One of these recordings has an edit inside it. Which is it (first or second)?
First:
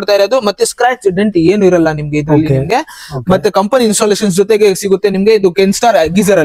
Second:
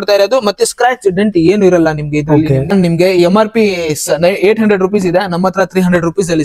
second